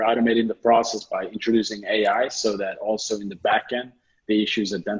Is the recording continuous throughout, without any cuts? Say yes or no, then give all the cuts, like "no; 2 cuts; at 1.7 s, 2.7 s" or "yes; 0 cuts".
yes; 0 cuts